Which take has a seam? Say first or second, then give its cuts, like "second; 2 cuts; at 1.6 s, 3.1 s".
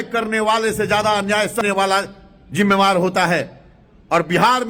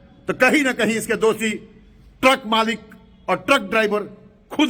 first; 1 cut; at 1.6 s